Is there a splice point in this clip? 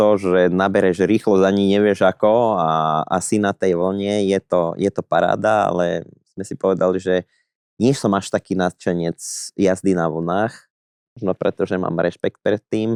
no; 0 cuts

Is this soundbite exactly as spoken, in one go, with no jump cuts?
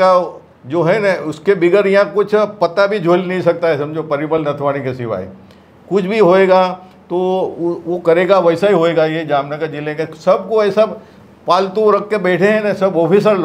yes; 0 cuts

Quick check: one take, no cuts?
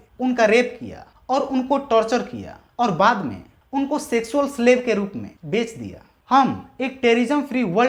yes; 0 cuts

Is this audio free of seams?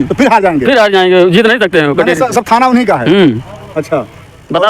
yes; 0 cuts

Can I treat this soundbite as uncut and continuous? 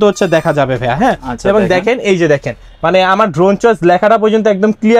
yes; 0 cuts

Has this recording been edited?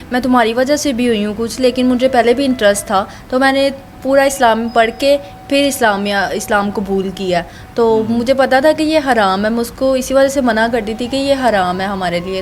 no; 0 cuts

